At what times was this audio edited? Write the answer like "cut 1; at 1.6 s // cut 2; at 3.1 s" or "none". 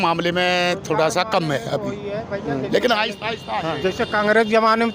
none